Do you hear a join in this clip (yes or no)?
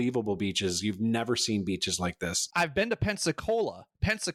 no